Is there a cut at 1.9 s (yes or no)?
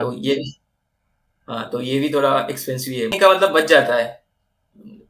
no